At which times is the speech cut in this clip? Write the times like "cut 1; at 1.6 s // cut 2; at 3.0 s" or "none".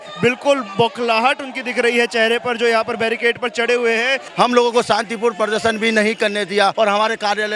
cut 1; at 4.2 s // cut 2; at 6.7 s